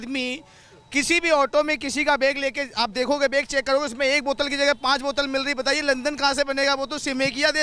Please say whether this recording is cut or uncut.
uncut